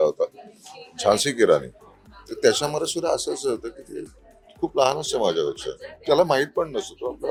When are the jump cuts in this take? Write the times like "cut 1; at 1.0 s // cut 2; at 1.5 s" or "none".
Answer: none